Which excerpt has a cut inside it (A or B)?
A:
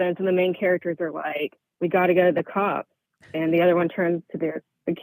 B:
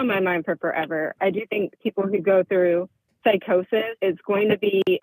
B